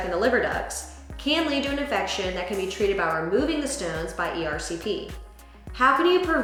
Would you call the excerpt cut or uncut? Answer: uncut